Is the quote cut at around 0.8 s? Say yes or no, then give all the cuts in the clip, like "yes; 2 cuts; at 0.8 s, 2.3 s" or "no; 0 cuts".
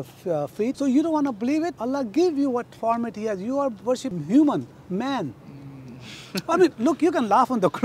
yes; 3 cuts; at 0.8 s, 1.8 s, 4.1 s